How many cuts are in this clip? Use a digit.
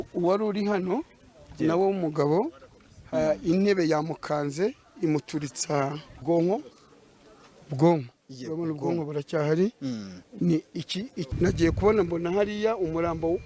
2